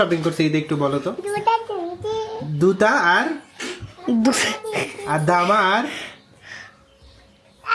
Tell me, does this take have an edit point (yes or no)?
no